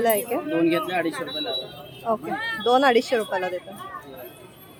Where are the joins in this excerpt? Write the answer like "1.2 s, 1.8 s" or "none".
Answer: none

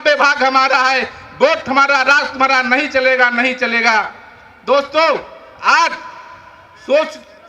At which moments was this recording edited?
none

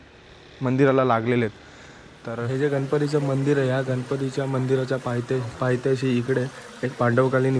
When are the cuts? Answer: 2.4 s

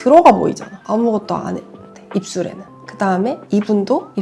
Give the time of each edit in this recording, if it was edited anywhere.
2.7 s

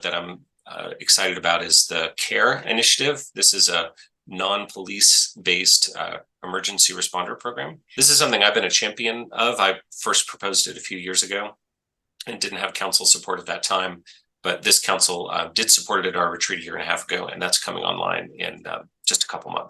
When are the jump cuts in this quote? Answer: 7.8 s

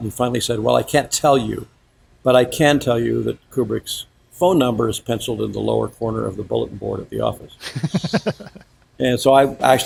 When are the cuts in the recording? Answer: none

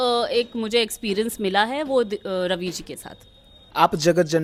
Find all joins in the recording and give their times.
none

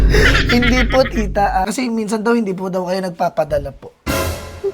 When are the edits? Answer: 1.6 s

